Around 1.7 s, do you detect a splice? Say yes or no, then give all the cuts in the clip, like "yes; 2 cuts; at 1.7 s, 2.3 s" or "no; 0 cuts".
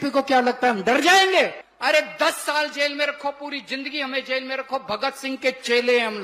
yes; 1 cut; at 1.7 s